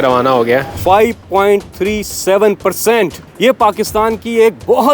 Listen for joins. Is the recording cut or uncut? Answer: cut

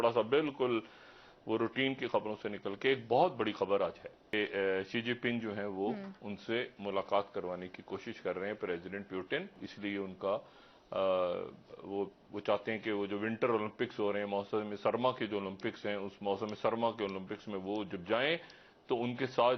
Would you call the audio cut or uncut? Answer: cut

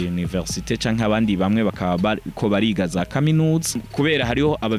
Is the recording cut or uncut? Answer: cut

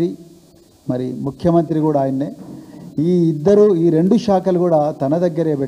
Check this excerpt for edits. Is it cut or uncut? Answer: uncut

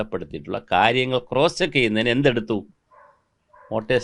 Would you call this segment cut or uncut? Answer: uncut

